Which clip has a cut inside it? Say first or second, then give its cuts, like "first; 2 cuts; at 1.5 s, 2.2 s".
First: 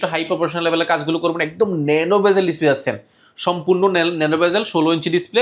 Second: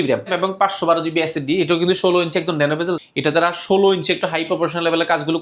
second; 1 cut; at 3.0 s